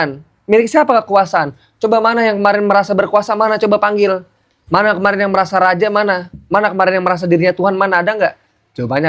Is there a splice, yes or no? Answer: no